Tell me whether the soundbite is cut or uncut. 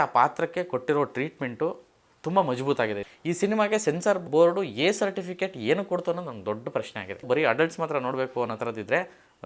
cut